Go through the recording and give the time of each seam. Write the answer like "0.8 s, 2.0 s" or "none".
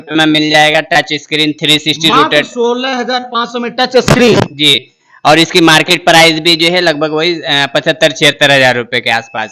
none